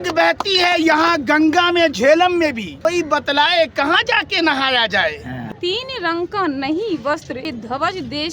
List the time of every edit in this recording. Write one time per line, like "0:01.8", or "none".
0:02.7
0:05.4
0:07.5